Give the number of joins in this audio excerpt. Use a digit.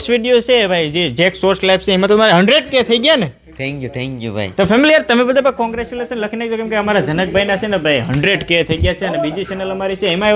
0